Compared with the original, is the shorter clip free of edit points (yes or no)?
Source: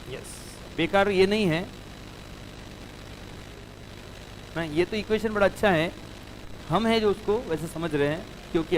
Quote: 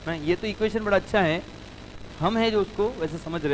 yes